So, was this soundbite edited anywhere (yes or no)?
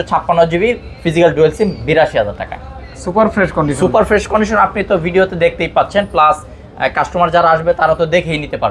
no